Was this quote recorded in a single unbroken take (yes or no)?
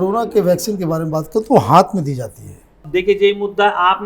no